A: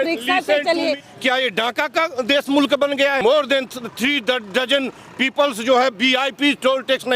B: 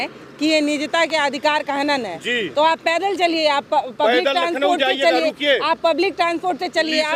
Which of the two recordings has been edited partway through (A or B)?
A